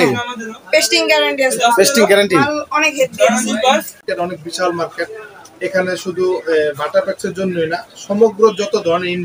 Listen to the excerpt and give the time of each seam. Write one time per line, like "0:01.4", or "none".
0:04.0